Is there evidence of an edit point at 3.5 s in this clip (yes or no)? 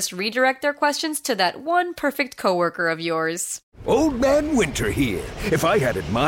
yes